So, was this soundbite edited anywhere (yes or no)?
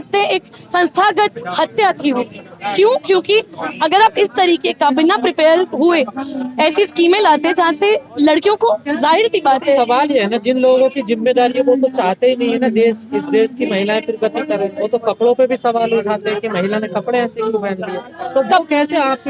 no